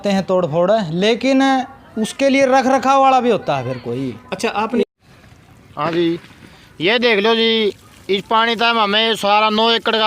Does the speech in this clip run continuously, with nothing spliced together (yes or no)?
no